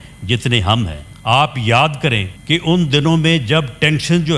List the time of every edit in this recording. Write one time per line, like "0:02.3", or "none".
0:01.1
0:02.3

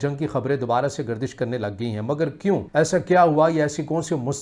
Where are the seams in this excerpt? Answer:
0:02.7

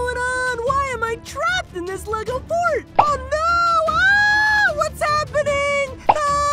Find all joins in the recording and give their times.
none

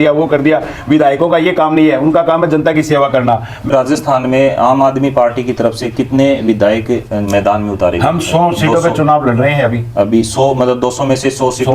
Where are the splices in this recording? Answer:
0:03.7

